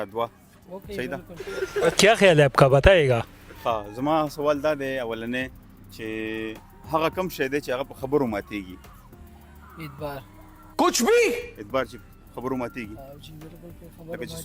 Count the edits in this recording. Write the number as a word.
zero